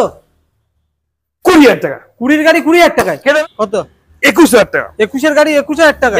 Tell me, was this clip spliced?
yes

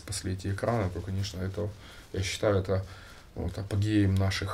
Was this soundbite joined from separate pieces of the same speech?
no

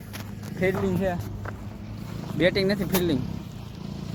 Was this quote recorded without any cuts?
yes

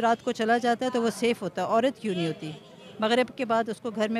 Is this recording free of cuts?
yes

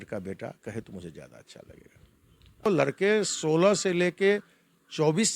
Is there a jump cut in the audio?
yes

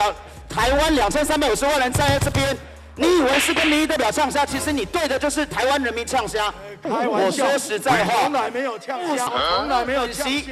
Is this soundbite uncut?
no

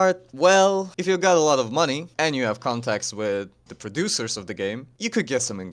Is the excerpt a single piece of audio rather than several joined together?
no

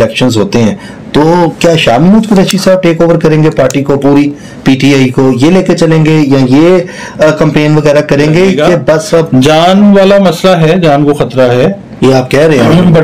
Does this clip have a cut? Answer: yes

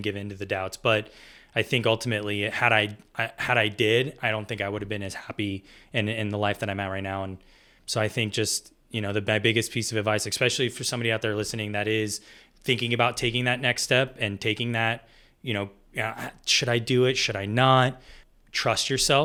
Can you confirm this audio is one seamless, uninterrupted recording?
yes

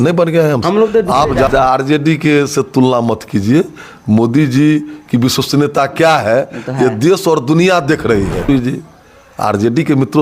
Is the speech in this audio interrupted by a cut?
yes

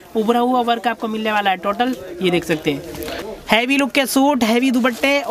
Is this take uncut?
no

